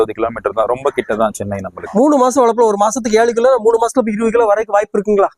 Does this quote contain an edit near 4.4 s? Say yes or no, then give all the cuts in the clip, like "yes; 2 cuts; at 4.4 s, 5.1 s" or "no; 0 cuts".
no; 1 cut; at 1.7 s